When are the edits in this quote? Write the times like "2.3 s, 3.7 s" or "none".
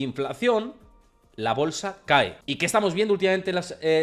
2.4 s